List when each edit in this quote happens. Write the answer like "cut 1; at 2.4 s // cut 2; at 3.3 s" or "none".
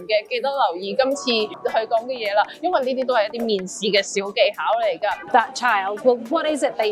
cut 1; at 5.3 s